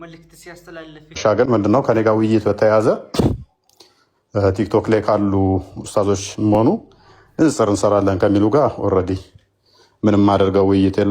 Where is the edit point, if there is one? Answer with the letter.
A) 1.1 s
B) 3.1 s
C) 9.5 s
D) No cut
A